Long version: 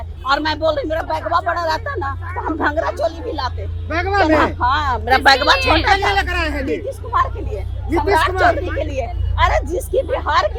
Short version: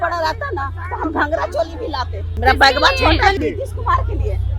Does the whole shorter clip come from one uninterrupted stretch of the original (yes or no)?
no